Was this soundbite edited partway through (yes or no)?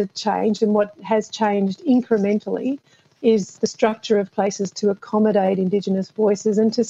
no